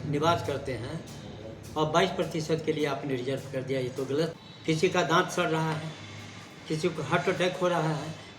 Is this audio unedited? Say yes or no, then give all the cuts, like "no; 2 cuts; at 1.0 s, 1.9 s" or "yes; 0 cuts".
no; 1 cut; at 4.4 s